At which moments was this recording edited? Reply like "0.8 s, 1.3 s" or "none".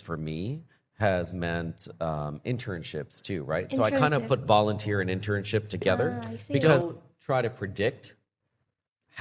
6.7 s